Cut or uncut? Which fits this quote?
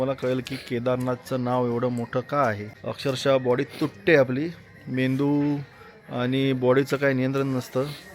uncut